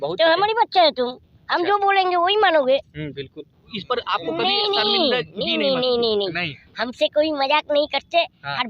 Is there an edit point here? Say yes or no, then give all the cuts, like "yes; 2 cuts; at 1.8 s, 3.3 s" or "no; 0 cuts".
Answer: yes; 1 cut; at 3.8 s